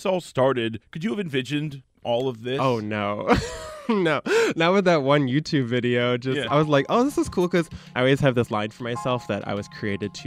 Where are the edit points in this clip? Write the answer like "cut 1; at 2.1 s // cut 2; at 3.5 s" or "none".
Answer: cut 1; at 0.9 s // cut 2; at 1.9 s // cut 3; at 7.8 s